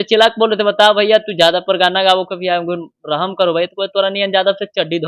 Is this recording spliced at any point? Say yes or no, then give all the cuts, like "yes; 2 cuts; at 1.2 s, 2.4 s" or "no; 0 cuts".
no; 0 cuts